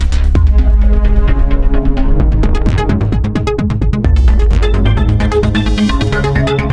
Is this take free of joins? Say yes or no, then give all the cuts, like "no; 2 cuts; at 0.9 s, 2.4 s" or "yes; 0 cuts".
yes; 0 cuts